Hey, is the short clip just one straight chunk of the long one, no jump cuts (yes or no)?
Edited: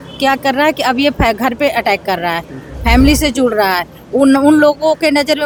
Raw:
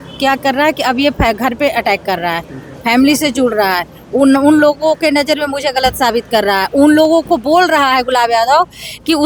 yes